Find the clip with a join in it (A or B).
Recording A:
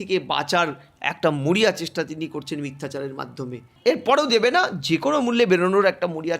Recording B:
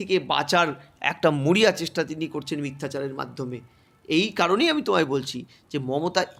A